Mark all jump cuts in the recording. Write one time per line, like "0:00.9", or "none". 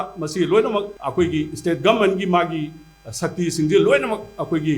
0:01.0